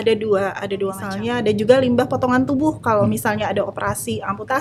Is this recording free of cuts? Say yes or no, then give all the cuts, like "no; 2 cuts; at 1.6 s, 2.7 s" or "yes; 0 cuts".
no; 1 cut; at 1.1 s